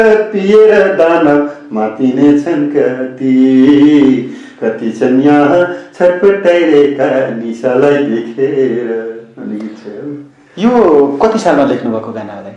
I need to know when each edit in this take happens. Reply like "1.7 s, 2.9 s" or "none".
none